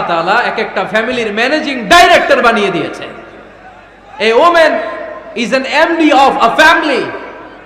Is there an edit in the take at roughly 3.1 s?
no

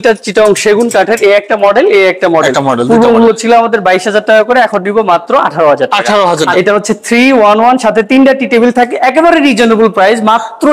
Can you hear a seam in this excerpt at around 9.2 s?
no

